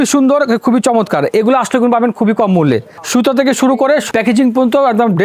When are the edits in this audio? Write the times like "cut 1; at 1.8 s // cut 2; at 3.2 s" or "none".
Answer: cut 1; at 2.9 s // cut 2; at 4.0 s